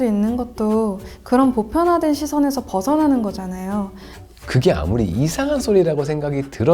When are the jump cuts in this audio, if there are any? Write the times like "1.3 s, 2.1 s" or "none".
4.1 s